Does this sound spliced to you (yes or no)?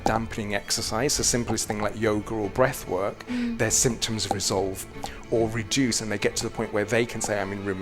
no